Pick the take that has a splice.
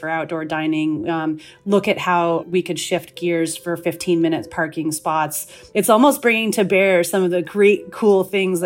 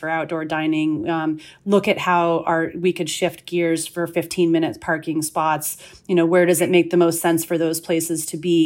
first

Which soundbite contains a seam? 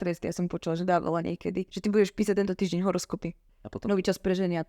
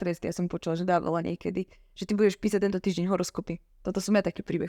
first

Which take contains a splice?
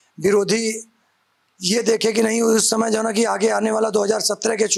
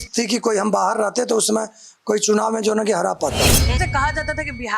second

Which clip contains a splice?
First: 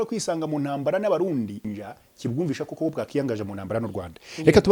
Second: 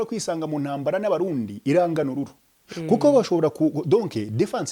first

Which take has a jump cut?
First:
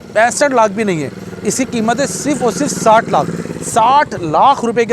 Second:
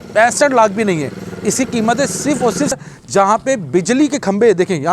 second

